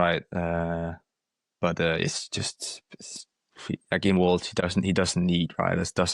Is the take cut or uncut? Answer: uncut